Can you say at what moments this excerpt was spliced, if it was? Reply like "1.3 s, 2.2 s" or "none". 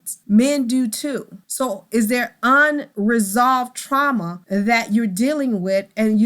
4.4 s